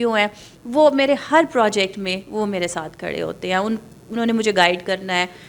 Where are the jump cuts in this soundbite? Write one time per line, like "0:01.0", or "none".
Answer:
none